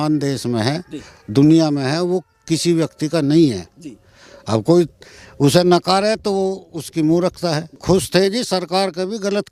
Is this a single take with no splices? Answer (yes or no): no